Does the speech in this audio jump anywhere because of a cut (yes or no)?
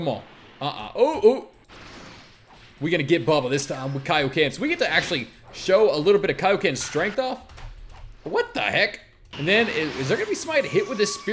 yes